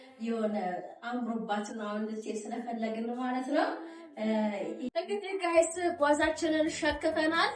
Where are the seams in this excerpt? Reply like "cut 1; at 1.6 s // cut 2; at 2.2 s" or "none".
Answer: cut 1; at 4.9 s

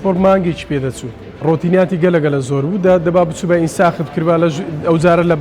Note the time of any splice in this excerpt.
cut 1; at 1.4 s

